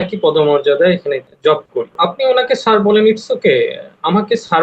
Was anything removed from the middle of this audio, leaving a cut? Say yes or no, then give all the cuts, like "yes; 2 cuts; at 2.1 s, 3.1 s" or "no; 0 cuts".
yes; 1 cut; at 2.0 s